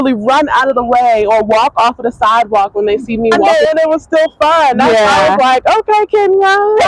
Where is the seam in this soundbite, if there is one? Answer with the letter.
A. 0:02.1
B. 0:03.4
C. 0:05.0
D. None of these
B